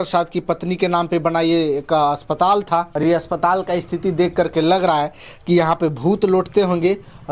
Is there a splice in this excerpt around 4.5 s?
no; 1 cut; at 2.9 s

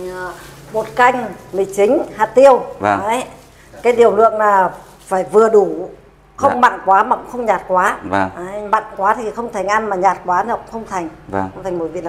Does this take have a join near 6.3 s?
no; 0 cuts

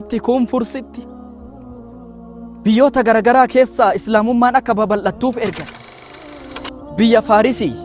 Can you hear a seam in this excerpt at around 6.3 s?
yes; 1 cut; at 6.3 s

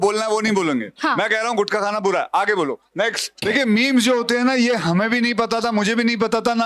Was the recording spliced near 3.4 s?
yes; 1 cut; at 3.4 s

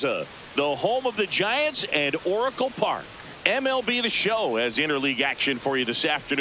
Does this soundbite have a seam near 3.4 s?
yes; 1 cut; at 3.4 s

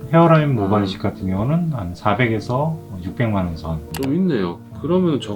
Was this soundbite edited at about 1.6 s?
no; 1 cut; at 3.9 s

